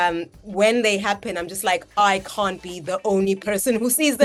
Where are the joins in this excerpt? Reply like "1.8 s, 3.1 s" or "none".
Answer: none